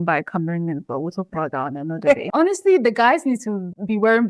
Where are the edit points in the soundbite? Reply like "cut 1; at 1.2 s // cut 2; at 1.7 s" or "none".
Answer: cut 1; at 2.2 s